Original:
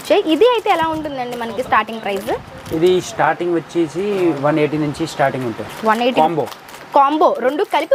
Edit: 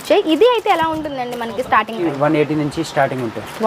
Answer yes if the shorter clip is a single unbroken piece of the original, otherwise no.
no